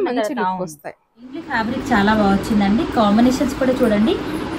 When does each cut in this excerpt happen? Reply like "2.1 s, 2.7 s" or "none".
1.6 s